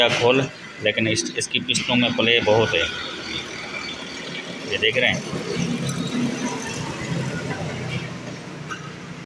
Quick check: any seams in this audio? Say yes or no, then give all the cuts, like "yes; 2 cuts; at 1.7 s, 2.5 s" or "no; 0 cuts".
no; 0 cuts